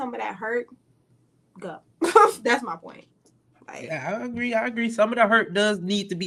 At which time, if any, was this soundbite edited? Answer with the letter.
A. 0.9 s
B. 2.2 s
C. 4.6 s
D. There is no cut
D